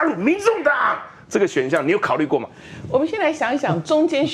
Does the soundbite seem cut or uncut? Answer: uncut